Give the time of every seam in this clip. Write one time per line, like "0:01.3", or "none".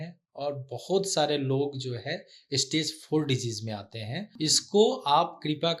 0:04.2